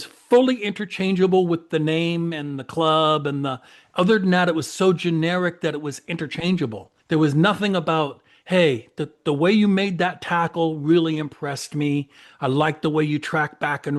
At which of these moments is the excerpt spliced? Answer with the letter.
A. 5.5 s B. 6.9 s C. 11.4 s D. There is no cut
B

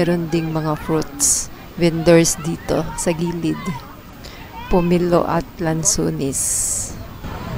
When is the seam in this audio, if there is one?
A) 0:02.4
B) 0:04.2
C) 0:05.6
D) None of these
D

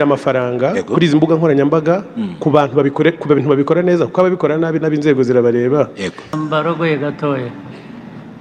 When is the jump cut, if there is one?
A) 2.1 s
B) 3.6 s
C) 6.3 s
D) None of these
C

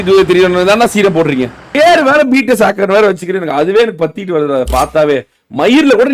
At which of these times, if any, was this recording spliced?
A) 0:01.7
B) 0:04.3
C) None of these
A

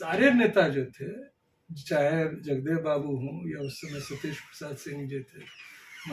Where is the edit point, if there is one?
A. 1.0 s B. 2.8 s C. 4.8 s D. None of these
D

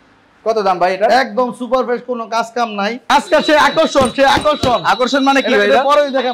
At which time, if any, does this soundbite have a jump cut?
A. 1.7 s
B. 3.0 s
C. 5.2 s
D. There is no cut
B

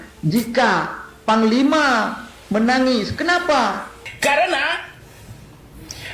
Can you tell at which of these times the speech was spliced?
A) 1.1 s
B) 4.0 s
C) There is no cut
B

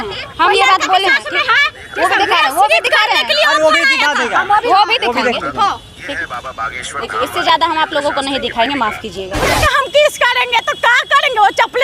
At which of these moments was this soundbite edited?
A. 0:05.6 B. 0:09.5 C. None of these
B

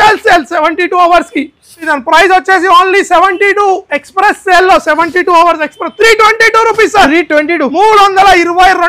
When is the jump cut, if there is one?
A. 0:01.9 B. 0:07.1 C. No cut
A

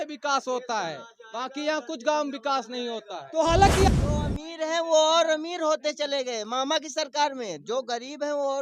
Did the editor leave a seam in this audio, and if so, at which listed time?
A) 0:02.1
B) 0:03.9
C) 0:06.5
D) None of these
B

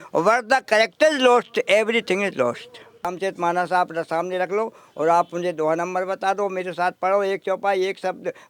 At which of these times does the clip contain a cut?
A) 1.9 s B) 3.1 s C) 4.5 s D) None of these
B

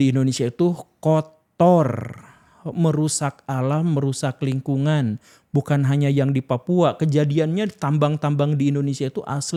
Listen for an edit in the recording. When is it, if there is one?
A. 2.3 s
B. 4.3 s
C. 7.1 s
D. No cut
D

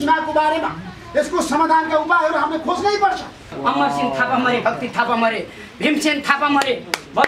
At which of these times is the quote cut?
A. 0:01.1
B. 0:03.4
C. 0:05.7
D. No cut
B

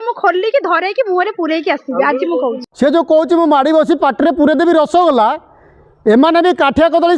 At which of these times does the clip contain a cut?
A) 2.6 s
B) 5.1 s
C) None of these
A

